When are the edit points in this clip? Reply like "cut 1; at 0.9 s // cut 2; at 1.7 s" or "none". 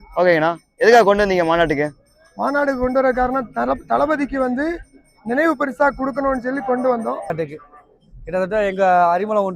cut 1; at 7.3 s